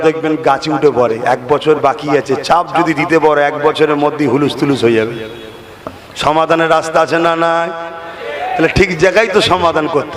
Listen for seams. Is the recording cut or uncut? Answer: uncut